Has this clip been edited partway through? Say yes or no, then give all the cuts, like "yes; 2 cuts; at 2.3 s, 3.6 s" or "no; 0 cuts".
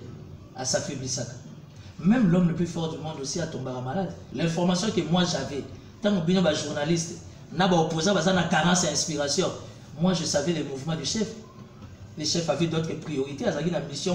yes; 1 cut; at 4.2 s